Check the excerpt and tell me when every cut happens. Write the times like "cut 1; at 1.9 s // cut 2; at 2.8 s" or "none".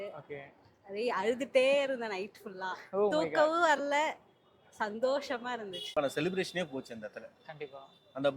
cut 1; at 5.9 s